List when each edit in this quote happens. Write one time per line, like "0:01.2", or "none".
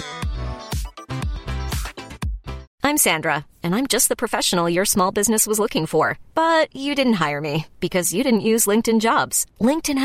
0:02.7